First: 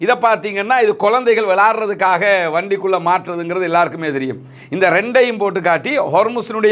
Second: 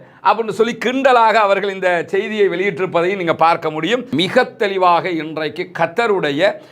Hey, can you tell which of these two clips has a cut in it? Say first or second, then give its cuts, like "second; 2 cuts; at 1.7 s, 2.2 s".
second; 1 cut; at 4.1 s